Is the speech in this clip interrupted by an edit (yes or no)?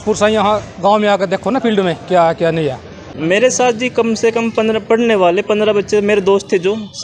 yes